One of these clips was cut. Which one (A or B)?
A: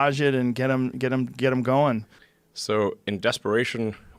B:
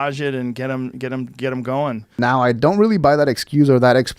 A